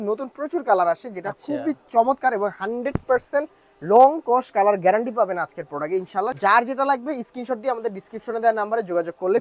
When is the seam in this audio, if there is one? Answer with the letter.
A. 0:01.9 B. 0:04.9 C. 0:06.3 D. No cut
C